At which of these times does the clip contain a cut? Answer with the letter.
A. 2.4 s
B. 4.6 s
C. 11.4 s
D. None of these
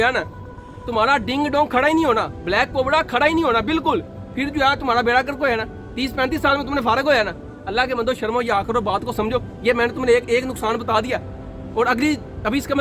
D